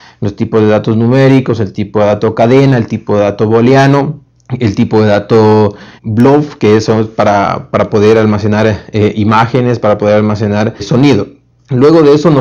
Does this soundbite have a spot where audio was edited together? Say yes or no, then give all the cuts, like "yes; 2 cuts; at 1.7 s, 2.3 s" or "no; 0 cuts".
no; 0 cuts